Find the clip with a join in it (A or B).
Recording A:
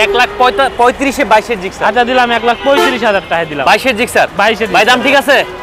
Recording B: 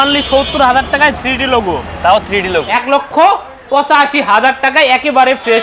B